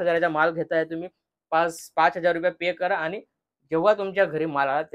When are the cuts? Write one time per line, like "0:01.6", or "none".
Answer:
none